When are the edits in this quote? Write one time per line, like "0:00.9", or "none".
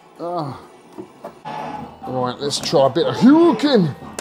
0:01.5